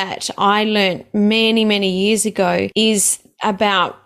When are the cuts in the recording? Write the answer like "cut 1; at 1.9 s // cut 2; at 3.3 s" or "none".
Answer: cut 1; at 2.7 s